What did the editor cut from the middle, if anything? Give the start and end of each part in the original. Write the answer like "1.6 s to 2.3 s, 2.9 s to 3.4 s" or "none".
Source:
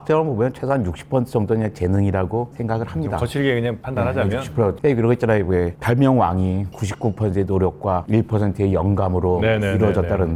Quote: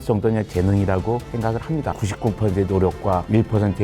3.2 s to 6.7 s